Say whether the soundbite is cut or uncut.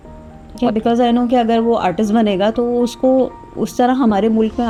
uncut